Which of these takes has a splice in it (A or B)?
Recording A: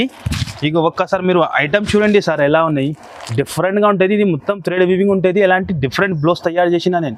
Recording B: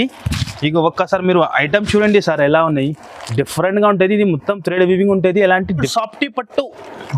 B